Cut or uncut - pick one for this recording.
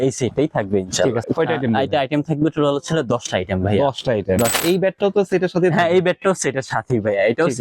cut